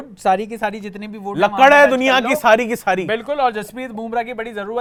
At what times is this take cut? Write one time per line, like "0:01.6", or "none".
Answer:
none

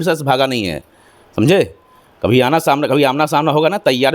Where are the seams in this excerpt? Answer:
none

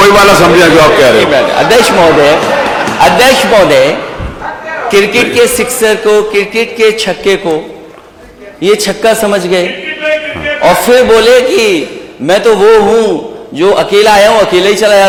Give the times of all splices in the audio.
none

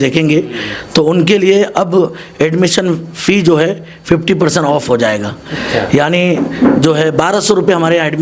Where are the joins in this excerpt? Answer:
none

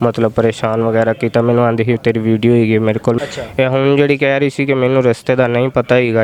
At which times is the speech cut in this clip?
0:03.2

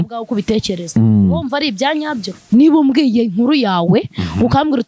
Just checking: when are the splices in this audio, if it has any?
0:02.3

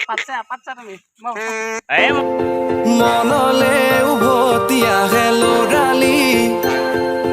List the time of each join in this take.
0:02.1

